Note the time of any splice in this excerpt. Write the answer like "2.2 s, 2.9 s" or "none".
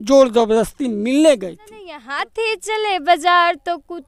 2.2 s

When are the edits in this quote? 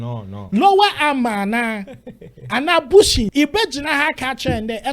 3.3 s

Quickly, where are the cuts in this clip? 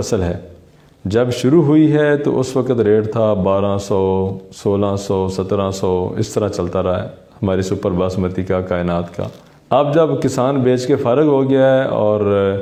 none

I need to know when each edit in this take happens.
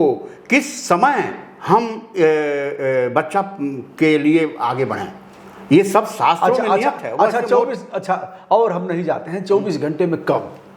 none

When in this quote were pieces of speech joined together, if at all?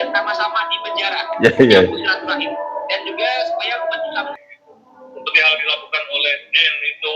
4.4 s

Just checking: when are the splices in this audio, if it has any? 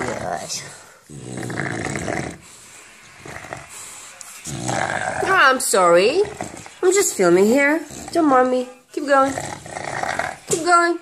8.0 s

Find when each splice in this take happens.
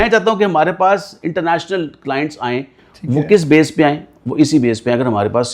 none

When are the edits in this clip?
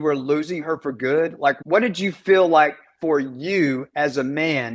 none

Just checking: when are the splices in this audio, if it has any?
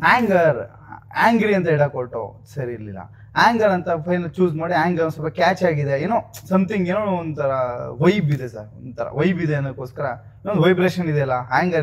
none

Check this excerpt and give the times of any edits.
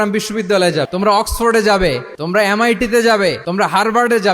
0.9 s, 2.1 s, 3.4 s

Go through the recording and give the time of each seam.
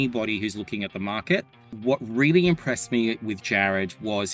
1.7 s

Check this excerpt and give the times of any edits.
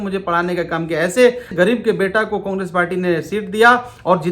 1.5 s

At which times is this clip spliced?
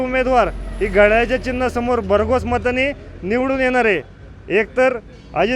none

